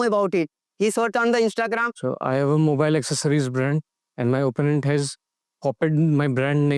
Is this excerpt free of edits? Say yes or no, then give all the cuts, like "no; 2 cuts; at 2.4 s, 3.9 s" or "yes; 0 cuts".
no; 1 cut; at 1.9 s